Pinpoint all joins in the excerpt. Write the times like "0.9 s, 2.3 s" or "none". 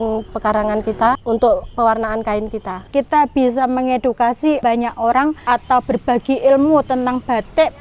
1.2 s, 2.9 s, 4.6 s